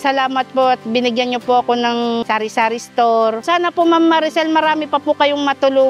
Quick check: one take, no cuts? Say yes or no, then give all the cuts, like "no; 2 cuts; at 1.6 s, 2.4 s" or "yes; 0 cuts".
yes; 0 cuts